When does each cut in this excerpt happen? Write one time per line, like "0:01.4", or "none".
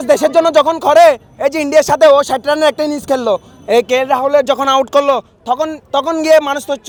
none